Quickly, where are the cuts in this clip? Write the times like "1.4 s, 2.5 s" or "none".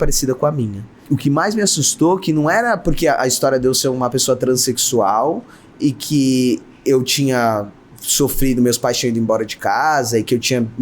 0.9 s